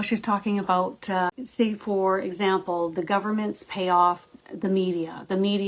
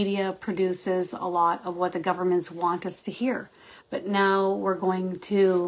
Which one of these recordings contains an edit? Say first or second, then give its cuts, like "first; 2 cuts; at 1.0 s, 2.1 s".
first; 1 cut; at 1.4 s